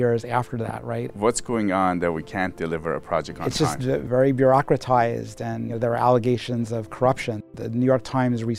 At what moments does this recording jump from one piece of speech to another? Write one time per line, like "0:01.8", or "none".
0:01.1
0:04.1
0:05.8
0:07.5